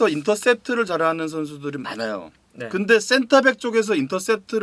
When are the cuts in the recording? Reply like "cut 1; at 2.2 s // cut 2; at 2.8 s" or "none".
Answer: none